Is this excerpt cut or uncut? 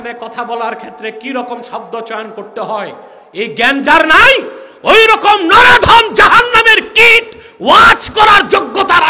uncut